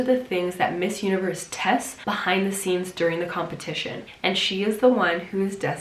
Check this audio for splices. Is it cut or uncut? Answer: cut